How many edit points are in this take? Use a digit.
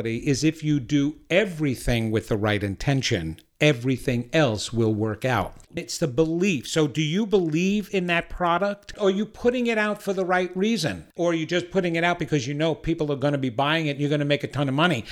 3